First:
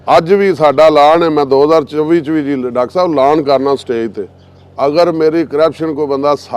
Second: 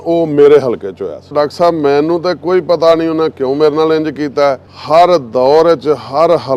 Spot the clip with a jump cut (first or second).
second